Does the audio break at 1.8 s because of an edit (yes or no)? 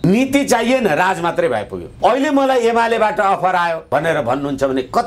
yes